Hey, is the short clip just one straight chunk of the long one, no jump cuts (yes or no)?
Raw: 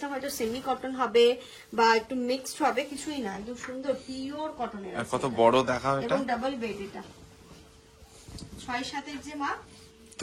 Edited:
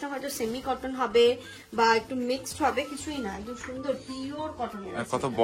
yes